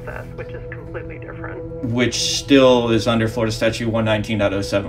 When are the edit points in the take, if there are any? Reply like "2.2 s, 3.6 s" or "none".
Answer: none